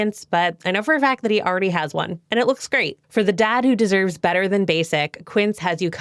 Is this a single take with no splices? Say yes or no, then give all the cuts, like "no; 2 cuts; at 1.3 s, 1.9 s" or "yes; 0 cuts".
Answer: yes; 0 cuts